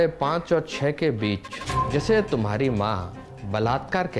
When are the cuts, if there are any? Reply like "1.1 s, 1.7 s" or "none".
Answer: none